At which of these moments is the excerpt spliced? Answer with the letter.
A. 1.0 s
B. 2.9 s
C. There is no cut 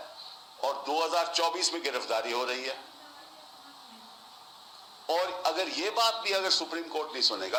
C